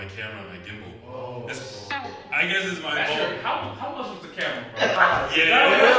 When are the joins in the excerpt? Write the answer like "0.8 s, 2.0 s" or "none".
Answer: 5.0 s